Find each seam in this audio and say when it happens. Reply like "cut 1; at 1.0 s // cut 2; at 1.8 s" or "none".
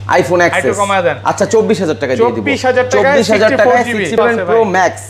cut 1; at 4.2 s

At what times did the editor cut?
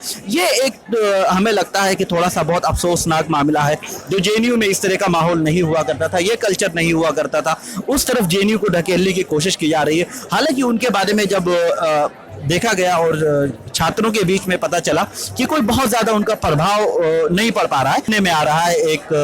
cut 1; at 18.1 s

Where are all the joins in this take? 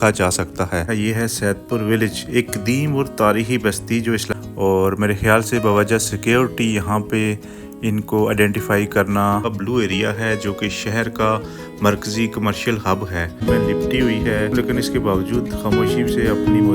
cut 1; at 0.9 s // cut 2; at 4.3 s // cut 3; at 9.5 s // cut 4; at 13.4 s

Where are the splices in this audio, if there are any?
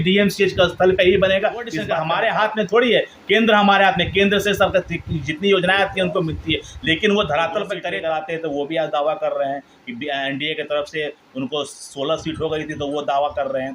cut 1; at 1.9 s // cut 2; at 7.8 s

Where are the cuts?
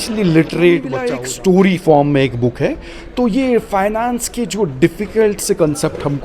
cut 1; at 1.1 s

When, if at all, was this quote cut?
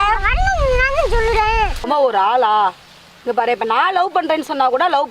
cut 1; at 1.9 s

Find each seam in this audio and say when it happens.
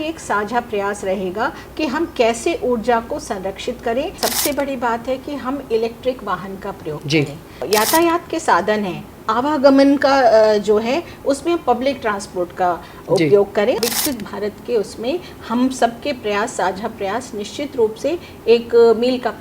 cut 1; at 4.1 s // cut 2; at 7.6 s // cut 3; at 13.8 s

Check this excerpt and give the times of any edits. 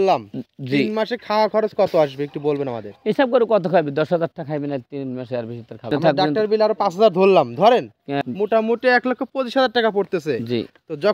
cut 1; at 5.9 s // cut 2; at 8.2 s

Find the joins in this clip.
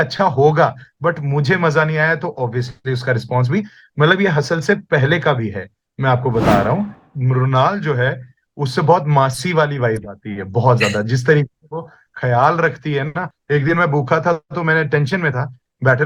cut 1; at 7.1 s // cut 2; at 13.3 s

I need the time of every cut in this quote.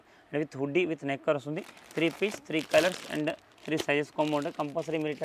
none

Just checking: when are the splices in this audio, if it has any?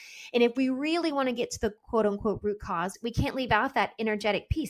cut 1; at 2.9 s

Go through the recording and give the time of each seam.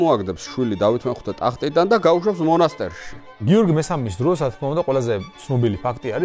cut 1; at 3.4 s

